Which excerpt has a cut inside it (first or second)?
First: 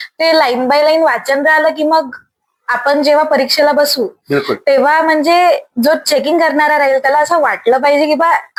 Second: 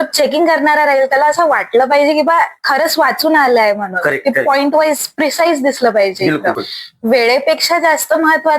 second